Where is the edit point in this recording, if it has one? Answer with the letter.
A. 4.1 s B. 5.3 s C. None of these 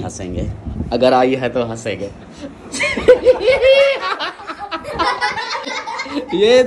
C